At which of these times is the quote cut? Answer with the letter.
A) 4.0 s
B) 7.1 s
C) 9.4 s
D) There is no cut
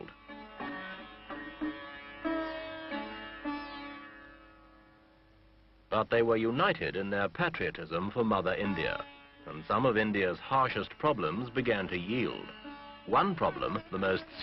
B